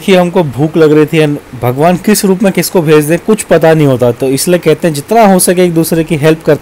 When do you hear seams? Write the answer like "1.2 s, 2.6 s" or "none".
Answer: none